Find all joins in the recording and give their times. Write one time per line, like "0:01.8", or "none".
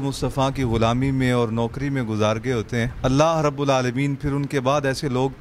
0:02.9

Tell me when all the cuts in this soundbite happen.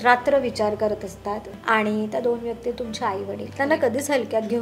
0:01.5
0:03.5

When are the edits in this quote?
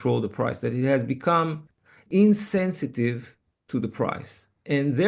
0:02.0

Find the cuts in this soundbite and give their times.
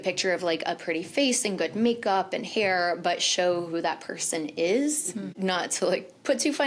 0:05.3

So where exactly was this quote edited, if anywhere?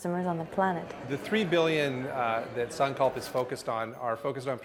0:00.9

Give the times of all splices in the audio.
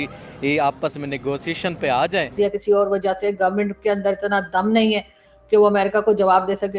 0:02.3

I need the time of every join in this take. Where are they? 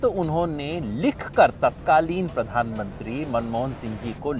none

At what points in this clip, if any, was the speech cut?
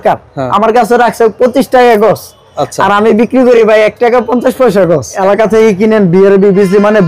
0:05.2

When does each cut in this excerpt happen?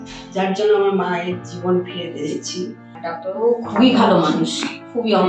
0:02.8

